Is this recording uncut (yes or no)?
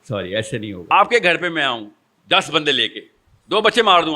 no